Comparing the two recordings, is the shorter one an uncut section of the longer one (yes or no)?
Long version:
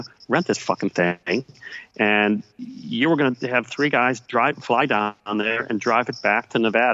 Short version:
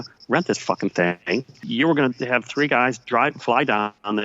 no